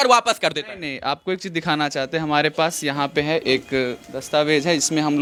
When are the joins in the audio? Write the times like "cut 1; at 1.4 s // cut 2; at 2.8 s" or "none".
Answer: none